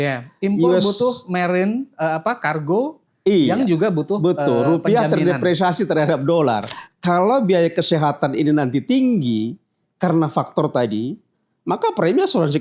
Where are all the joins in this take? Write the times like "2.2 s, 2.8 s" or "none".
6.8 s